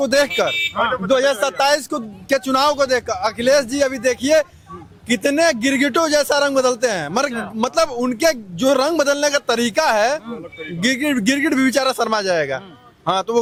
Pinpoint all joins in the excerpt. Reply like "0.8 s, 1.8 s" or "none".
none